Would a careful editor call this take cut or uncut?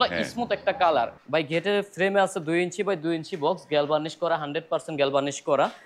cut